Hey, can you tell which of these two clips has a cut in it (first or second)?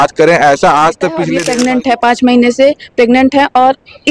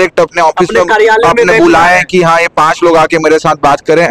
first